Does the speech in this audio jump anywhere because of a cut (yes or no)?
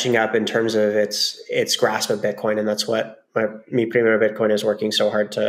no